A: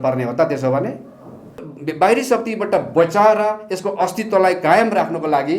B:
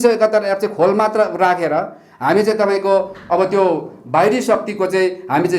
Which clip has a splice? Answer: A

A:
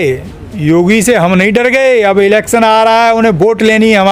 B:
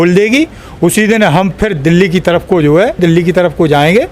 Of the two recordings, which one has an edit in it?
B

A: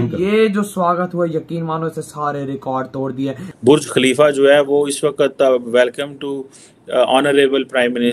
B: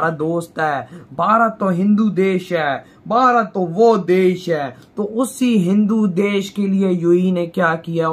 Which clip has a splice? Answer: A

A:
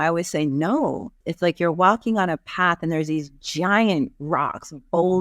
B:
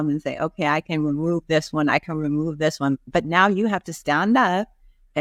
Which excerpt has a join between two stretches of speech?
A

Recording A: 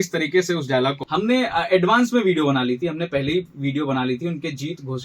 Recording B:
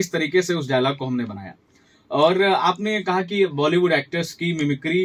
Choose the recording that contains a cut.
A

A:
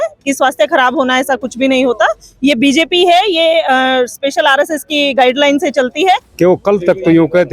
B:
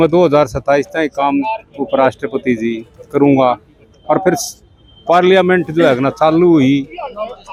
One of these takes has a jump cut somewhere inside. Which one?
A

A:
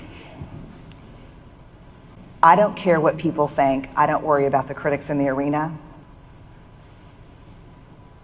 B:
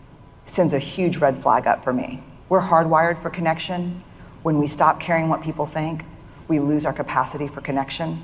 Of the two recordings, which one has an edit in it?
A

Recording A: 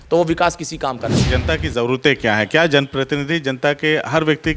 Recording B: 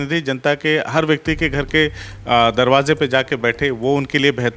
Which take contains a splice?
A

